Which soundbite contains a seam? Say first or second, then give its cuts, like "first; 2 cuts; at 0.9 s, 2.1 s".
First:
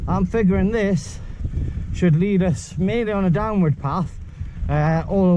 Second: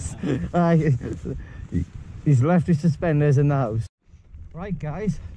second; 1 cut; at 4.0 s